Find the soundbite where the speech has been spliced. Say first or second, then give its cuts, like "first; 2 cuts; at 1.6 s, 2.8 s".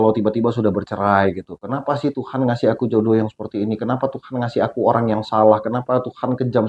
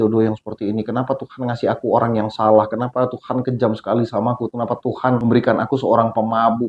second; 1 cut; at 5.2 s